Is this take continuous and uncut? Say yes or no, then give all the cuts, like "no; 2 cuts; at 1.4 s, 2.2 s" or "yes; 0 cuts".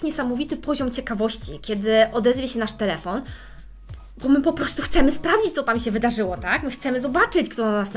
yes; 0 cuts